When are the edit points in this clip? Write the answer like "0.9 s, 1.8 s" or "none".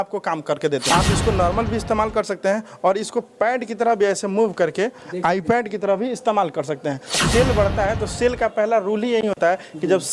0.9 s, 7.2 s